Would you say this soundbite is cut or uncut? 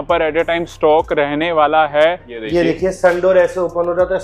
cut